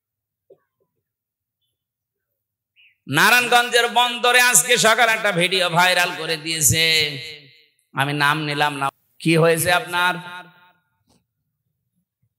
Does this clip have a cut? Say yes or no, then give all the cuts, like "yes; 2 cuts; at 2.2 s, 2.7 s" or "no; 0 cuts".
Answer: yes; 1 cut; at 8.9 s